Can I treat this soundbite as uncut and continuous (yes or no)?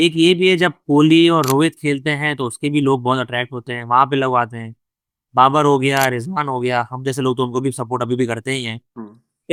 yes